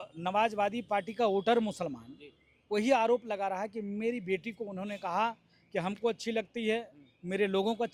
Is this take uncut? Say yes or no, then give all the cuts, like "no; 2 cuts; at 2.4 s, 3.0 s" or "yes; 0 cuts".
yes; 0 cuts